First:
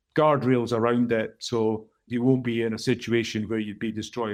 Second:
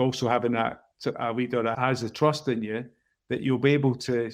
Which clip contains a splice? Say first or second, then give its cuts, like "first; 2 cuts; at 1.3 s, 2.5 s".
second; 1 cut; at 1.2 s